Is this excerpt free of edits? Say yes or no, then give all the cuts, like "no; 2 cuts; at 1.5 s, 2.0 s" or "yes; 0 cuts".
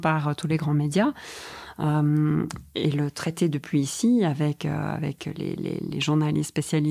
yes; 0 cuts